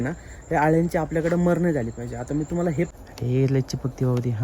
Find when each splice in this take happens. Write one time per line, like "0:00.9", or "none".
0:02.9